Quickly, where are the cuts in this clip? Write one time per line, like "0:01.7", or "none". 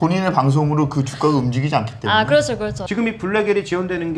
0:02.8